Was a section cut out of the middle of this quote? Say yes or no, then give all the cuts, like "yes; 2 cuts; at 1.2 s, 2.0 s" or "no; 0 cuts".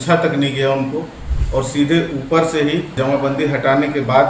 yes; 1 cut; at 2.9 s